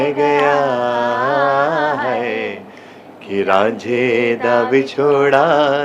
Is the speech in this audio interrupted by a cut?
no; 0 cuts

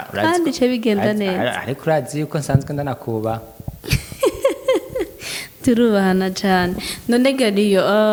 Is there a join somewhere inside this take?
no; 0 cuts

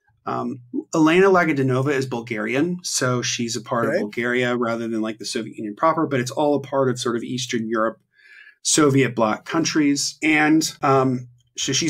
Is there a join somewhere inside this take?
yes; 2 cuts; at 10.1 s, 10.7 s

